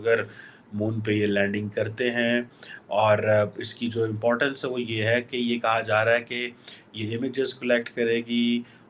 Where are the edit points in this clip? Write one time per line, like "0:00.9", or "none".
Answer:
none